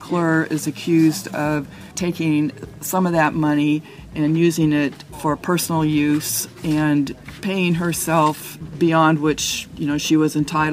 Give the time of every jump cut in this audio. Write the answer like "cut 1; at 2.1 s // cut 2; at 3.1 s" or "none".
cut 1; at 1.9 s